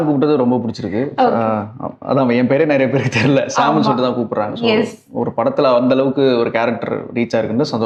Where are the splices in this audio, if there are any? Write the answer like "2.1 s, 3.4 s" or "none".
none

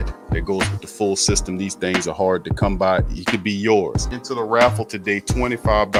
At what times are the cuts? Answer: none

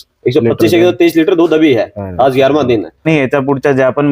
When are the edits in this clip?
3.1 s

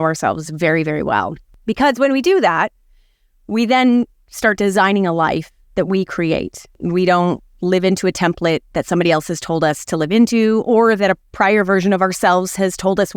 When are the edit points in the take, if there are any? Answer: 1.6 s, 6.8 s

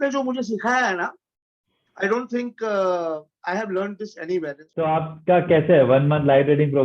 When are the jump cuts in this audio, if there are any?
4.6 s

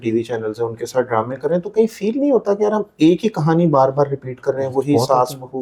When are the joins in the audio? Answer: none

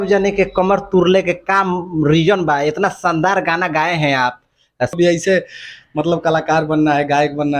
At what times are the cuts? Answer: 5.0 s

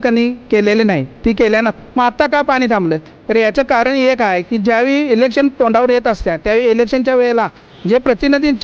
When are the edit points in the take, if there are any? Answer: 1.7 s

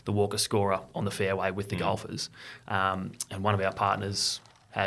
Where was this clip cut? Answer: none

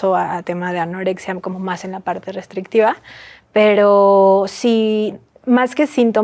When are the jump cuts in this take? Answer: none

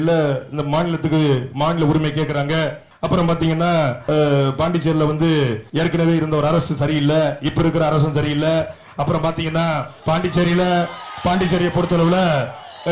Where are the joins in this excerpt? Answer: 2.9 s, 4.0 s, 5.6 s, 9.9 s, 11.0 s

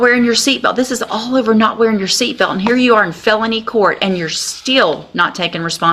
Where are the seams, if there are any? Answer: none

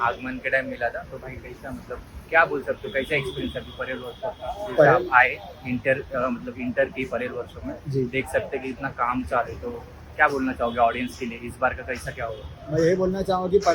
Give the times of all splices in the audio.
none

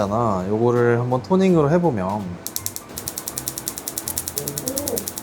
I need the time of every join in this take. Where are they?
2.4 s

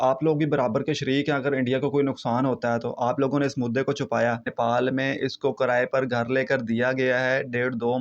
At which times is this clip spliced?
4.5 s

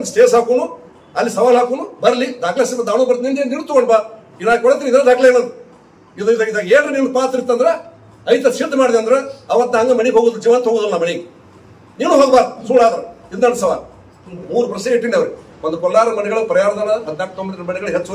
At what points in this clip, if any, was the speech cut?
14.4 s

